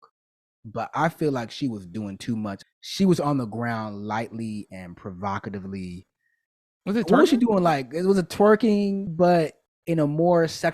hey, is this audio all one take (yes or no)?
no